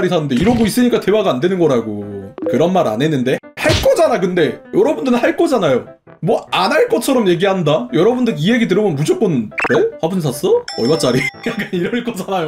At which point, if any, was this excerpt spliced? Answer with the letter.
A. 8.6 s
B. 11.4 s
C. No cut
B